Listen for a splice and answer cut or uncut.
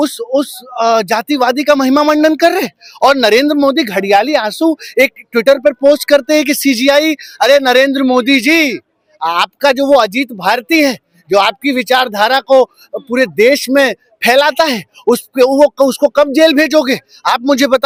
uncut